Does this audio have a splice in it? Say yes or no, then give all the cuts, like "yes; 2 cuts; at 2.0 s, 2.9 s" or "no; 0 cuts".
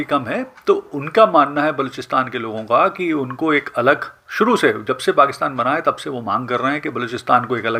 no; 0 cuts